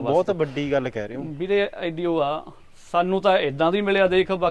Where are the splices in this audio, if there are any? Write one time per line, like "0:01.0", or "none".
none